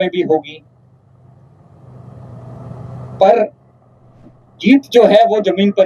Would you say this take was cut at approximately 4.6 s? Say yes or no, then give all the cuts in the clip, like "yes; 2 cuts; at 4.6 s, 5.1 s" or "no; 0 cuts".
no; 0 cuts